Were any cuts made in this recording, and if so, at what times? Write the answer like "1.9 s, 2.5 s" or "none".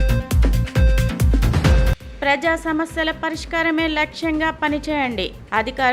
1.6 s